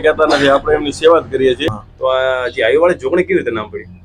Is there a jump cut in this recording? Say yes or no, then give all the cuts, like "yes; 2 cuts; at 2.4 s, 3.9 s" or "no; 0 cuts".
yes; 1 cut; at 1.7 s